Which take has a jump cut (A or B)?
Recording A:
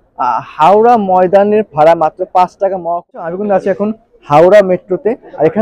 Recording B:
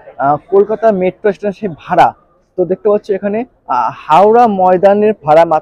A